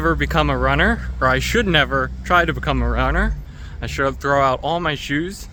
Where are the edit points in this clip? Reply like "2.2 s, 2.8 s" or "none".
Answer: none